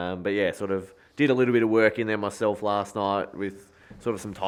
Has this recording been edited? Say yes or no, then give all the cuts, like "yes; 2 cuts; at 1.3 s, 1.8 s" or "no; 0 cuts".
no; 0 cuts